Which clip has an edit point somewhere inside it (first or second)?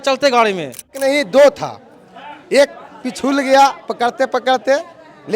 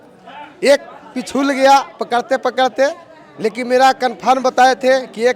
first